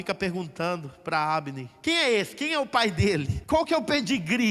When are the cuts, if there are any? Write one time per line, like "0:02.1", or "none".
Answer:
0:01.6
0:03.3